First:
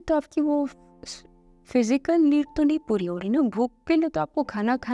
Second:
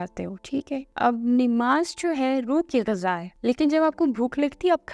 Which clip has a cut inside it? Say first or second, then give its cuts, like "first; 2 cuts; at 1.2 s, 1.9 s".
second; 2 cuts; at 0.9 s, 3.3 s